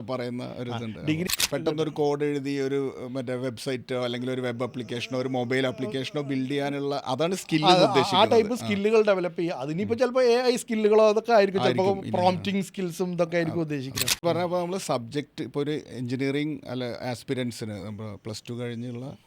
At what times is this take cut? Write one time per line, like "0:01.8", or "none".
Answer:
0:01.3
0:14.2

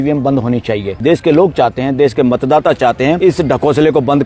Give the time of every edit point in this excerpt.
0:00.9

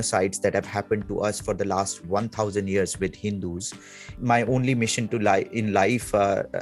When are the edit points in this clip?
0:04.1

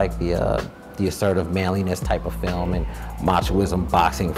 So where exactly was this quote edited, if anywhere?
none

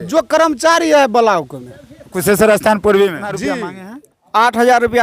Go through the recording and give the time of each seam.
0:03.6

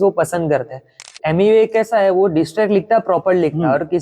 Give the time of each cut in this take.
0:01.1

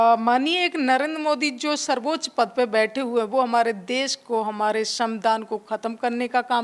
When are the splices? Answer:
none

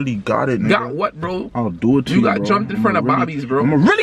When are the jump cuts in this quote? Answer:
none

